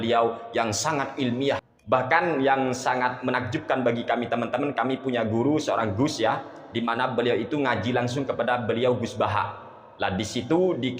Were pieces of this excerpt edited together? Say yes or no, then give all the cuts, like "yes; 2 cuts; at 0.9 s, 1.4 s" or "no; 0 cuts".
yes; 1 cut; at 1.6 s